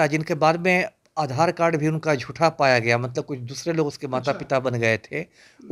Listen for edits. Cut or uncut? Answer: uncut